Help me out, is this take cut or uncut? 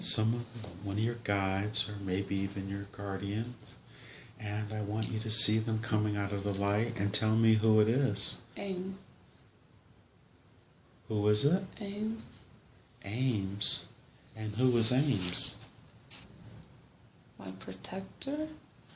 cut